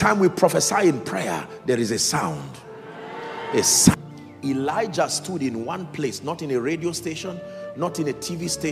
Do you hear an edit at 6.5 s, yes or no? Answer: no